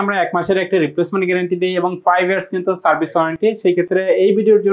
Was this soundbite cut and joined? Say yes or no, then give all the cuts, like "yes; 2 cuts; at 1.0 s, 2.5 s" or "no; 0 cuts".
no; 0 cuts